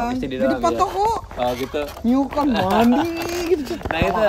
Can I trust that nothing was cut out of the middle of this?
yes; 0 cuts

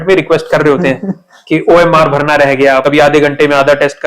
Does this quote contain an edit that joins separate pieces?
yes; 1 cut; at 2.8 s

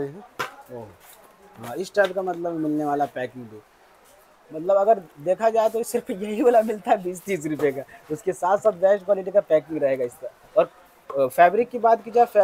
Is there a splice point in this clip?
no; 0 cuts

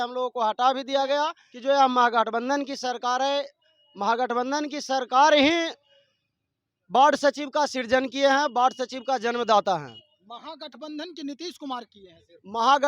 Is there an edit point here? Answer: yes; 1 cut; at 1.5 s

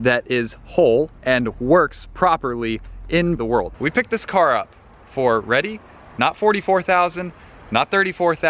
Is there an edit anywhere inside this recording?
yes; 2 cuts; at 1.1 s, 3.4 s

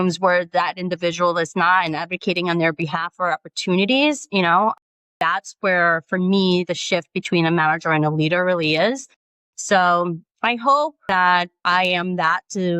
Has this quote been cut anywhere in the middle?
no; 0 cuts

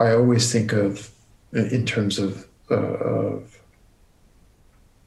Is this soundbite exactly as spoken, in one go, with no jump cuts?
yes; 0 cuts

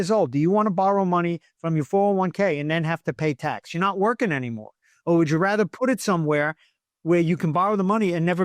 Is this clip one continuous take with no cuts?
yes; 0 cuts

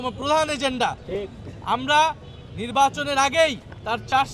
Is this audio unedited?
yes; 0 cuts

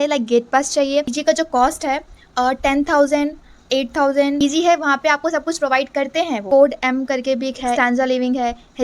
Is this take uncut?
no; 4 cuts; at 1.1 s, 4.4 s, 6.4 s, 7.8 s

